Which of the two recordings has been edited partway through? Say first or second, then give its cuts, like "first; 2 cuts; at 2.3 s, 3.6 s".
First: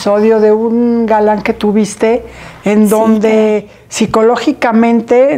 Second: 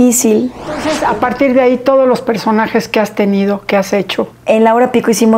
second; 2 cuts; at 0.9 s, 4.3 s